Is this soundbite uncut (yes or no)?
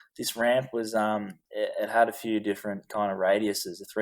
no